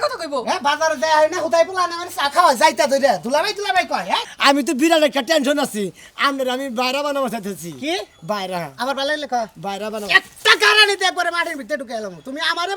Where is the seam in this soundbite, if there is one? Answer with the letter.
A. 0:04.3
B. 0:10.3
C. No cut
A